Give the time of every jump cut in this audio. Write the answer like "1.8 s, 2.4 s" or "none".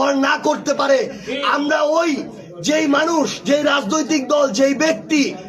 none